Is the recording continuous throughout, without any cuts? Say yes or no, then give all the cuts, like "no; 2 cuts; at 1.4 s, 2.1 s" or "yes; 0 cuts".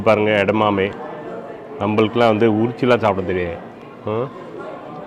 yes; 0 cuts